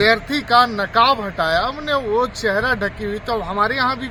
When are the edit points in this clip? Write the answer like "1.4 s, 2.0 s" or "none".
none